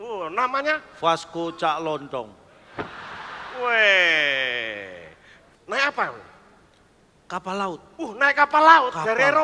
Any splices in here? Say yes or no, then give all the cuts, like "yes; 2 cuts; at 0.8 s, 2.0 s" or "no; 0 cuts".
yes; 1 cut; at 5.4 s